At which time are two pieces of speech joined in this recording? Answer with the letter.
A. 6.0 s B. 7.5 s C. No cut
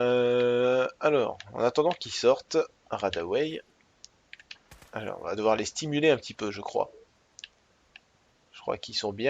A